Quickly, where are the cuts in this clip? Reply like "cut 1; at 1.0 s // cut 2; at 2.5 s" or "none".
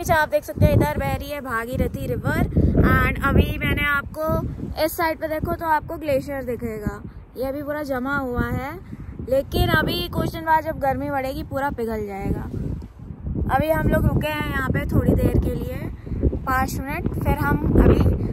none